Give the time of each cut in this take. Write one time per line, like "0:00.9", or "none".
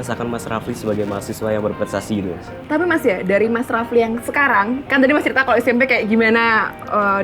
0:02.5